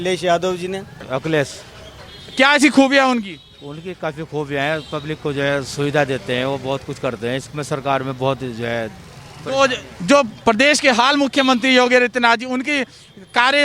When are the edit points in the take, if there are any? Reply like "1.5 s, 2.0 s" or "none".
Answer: 0.9 s

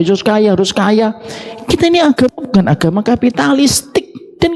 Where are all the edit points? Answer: none

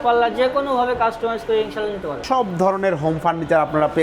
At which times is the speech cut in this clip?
2.2 s

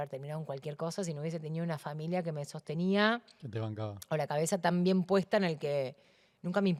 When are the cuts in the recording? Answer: none

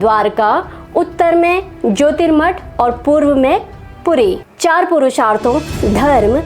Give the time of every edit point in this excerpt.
4.5 s

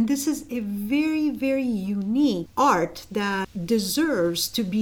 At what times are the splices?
2.5 s, 3.5 s

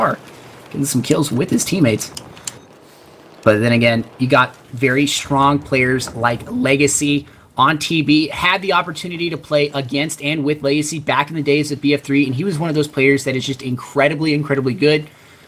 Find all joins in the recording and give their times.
none

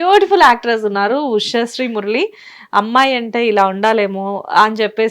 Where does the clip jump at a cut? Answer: none

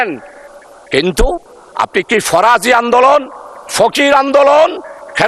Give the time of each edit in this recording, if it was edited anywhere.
none

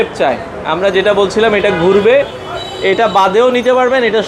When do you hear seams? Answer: none

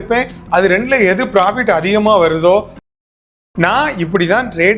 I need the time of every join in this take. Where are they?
3.0 s

